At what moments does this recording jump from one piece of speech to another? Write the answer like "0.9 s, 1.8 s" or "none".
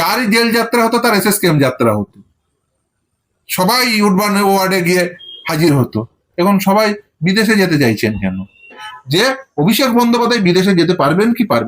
8.9 s